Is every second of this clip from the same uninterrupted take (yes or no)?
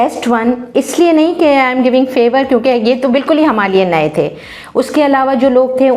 yes